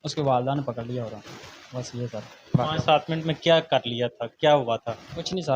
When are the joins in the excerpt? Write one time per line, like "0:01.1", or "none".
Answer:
none